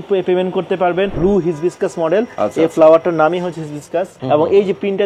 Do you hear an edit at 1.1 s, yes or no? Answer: yes